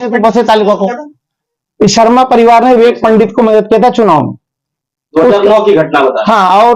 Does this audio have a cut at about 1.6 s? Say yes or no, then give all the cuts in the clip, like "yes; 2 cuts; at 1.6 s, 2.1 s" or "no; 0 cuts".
no; 0 cuts